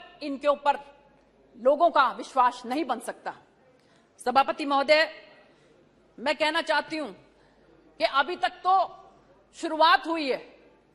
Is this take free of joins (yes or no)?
yes